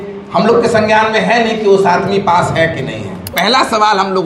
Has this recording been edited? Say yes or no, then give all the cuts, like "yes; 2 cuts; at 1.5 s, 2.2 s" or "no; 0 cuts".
yes; 1 cut; at 3.3 s